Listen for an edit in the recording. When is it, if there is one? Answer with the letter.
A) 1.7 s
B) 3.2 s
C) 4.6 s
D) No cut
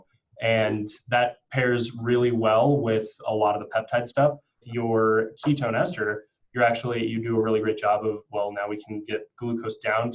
C